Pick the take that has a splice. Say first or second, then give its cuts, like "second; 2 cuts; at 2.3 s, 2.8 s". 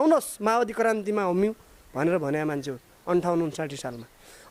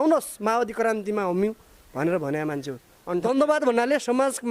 second; 1 cut; at 3.2 s